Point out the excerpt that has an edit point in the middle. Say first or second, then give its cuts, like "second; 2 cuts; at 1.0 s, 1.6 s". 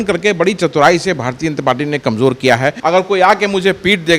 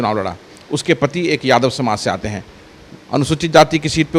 first; 1 cut; at 2.8 s